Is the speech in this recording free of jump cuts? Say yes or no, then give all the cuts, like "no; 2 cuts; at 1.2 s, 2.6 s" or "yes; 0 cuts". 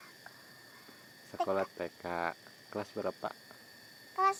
yes; 0 cuts